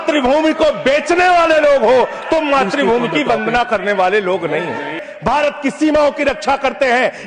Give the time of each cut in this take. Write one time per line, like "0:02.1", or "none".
0:05.1